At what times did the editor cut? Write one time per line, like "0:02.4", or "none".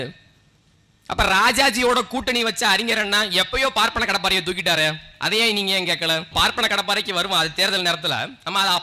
0:06.4